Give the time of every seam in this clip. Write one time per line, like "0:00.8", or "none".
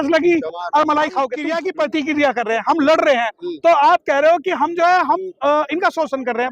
0:01.4